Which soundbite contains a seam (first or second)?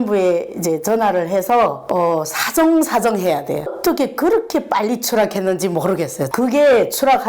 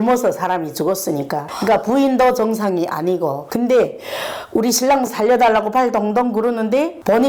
first